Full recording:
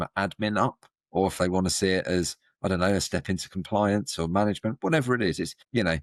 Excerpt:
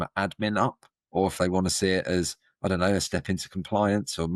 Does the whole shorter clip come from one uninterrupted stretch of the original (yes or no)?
yes